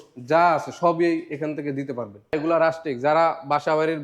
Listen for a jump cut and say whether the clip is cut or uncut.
cut